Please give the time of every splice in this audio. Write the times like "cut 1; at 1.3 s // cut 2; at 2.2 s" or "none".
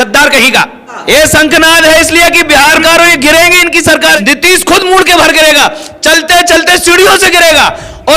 cut 1; at 0.9 s // cut 2; at 2.8 s // cut 3; at 4.2 s